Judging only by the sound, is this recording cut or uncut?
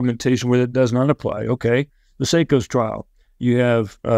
uncut